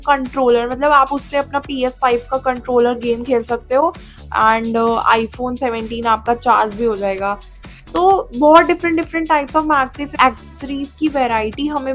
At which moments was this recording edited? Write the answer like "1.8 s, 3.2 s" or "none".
none